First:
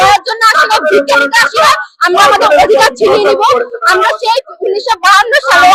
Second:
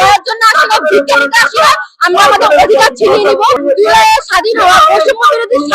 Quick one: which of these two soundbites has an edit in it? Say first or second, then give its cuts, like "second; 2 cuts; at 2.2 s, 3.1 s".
second; 1 cut; at 3.6 s